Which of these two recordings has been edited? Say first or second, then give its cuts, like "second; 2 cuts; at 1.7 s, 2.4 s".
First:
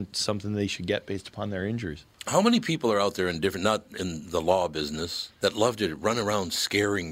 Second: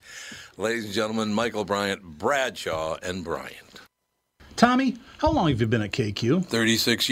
second; 1 cut; at 4.4 s